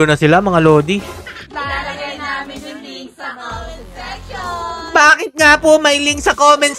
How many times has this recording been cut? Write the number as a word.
one